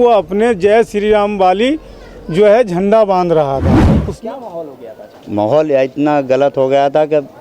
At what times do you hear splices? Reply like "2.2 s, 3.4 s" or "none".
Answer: 4.0 s